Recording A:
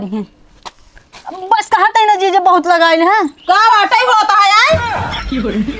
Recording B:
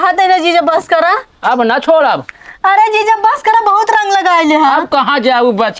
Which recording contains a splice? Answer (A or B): A